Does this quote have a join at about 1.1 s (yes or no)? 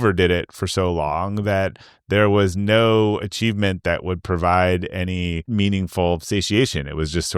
no